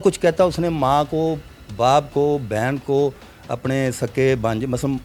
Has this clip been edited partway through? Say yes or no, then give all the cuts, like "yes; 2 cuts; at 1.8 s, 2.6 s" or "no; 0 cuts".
no; 0 cuts